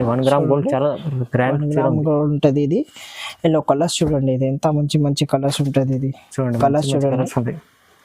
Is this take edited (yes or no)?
no